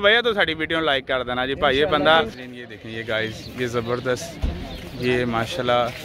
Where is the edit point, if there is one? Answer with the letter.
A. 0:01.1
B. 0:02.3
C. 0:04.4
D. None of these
B